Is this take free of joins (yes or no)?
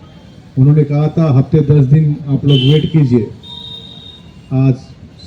yes